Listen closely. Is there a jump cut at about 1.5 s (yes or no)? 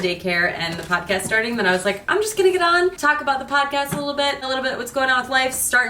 no